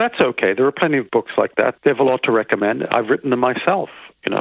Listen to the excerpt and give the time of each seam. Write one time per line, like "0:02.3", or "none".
0:01.8